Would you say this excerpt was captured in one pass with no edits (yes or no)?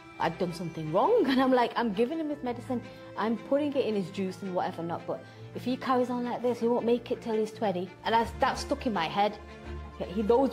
yes